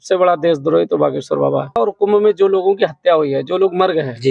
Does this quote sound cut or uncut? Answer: cut